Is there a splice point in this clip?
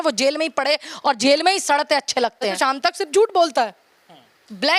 yes; 1 cut; at 2.6 s

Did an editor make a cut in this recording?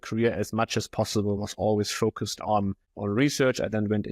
yes; 1 cut; at 2.9 s

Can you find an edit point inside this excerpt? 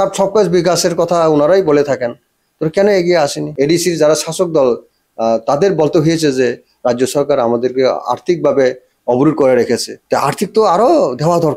yes; 2 cuts; at 3.4 s, 9.9 s

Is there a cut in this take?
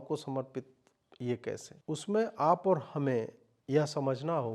yes; 1 cut; at 1.7 s

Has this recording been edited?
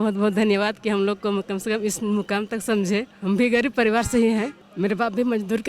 yes; 2 cuts; at 3.1 s, 4.6 s

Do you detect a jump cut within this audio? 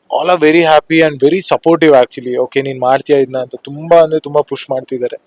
no; 0 cuts

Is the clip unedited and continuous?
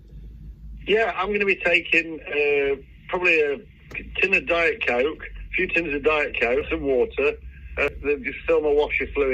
no; 2 cuts; at 6.7 s, 7.9 s

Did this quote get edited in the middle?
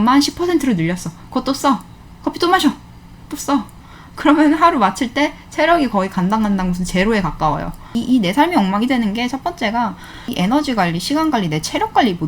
yes; 2 cuts; at 8.0 s, 10.2 s

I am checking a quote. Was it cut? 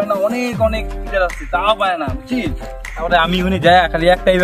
no; 0 cuts

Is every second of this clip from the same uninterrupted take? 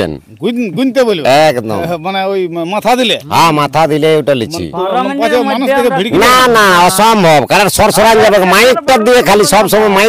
yes; 0 cuts

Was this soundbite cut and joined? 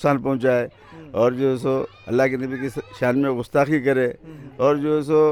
no; 0 cuts

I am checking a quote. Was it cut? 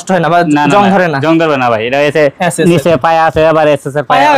no; 0 cuts

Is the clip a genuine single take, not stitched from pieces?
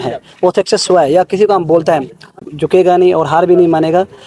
no; 1 cut; at 2.5 s

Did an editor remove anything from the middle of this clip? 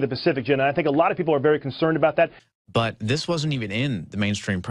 yes; 1 cut; at 2.4 s

